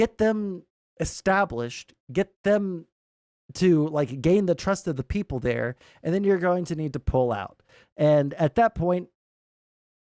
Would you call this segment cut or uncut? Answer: uncut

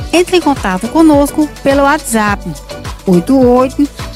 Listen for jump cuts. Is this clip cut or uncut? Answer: uncut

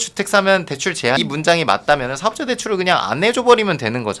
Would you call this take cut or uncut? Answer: cut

